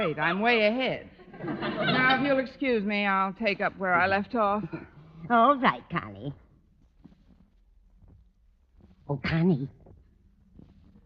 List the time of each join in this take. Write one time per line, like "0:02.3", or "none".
0:02.8